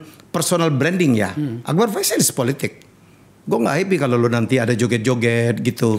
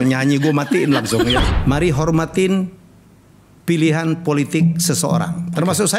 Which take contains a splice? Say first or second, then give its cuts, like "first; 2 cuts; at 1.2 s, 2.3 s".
second; 1 cut; at 1.5 s